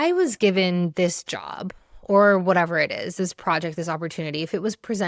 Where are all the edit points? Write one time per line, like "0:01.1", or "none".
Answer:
none